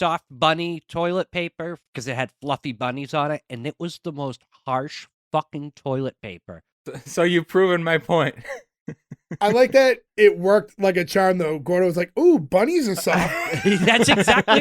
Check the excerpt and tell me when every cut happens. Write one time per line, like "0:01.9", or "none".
0:01.8